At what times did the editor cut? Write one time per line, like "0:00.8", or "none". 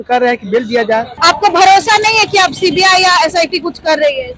0:01.1